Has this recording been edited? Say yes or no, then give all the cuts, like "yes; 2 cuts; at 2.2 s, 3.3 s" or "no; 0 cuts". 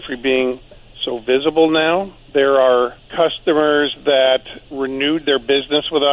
yes; 3 cuts; at 2.2 s, 3.0 s, 4.6 s